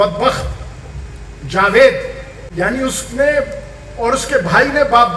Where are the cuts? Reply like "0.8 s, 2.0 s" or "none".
2.4 s